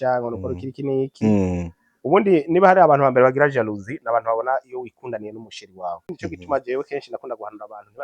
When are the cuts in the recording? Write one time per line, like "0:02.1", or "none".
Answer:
0:06.2